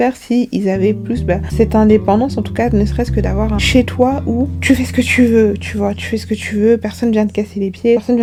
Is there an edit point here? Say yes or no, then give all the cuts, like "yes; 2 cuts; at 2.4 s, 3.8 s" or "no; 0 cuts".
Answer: no; 0 cuts